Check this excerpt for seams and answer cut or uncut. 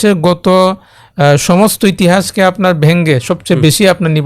uncut